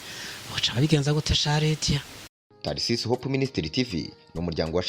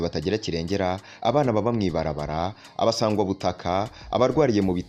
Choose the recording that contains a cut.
first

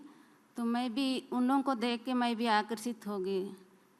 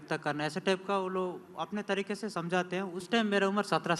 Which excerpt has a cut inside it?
second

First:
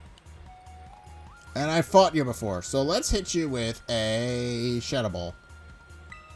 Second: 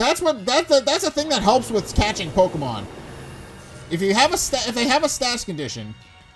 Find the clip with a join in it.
first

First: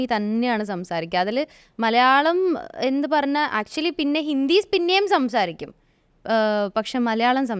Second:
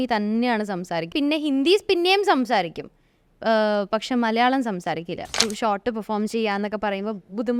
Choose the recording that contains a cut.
second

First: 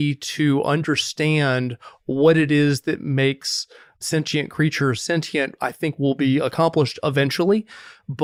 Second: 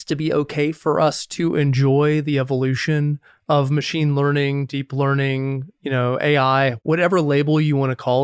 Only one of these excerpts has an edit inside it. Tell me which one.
second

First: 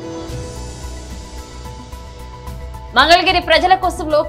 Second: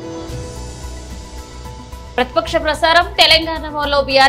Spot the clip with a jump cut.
first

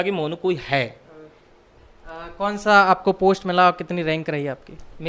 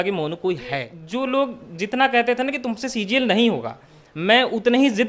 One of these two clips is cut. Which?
second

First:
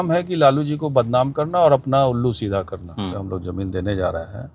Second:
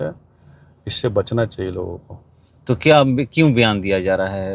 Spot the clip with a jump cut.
first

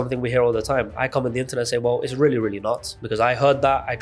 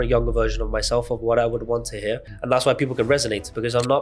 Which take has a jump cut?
second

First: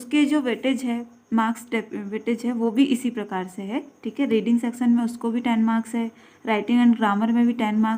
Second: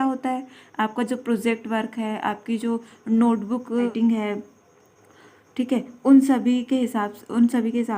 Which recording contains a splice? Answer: second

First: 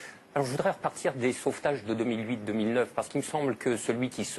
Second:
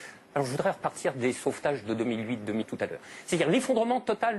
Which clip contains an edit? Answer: first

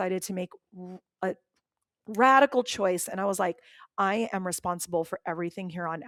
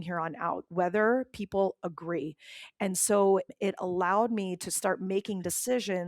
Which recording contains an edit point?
second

